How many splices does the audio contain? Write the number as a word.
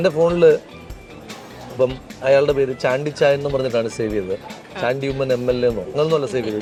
zero